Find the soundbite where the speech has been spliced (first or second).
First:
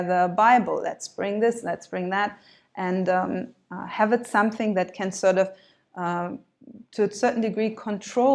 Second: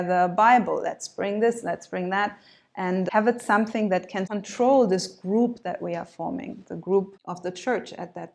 second